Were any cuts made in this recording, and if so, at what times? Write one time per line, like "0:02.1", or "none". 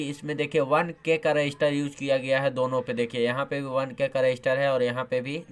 none